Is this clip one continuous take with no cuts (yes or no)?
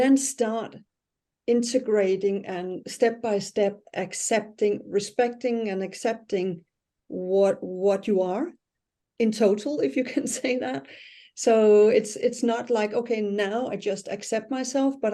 yes